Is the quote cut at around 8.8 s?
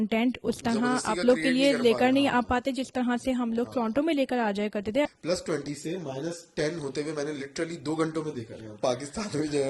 yes; 2 cuts; at 5.1 s, 8.8 s

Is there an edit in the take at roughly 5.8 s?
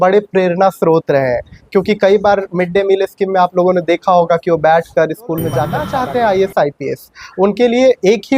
yes; 1 cut; at 5.8 s

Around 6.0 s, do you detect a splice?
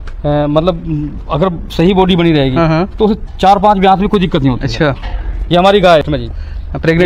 yes; 1 cut; at 6.0 s

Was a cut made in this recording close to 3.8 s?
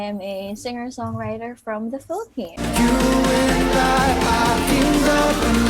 no; 1 cut; at 2.5 s

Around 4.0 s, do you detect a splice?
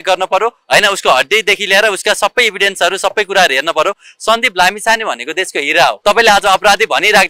no; 0 cuts

